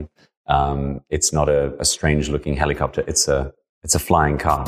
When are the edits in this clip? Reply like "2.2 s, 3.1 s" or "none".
none